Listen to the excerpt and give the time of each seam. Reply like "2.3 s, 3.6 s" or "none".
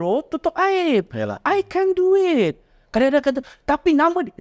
none